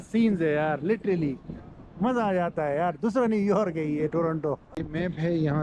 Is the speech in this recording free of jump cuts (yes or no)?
no